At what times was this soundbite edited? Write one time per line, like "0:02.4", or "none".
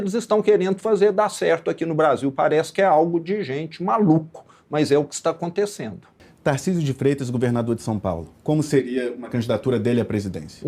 0:06.1